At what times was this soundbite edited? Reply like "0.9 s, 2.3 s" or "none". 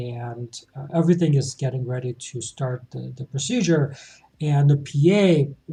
none